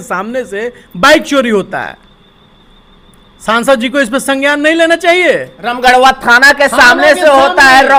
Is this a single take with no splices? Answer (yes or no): yes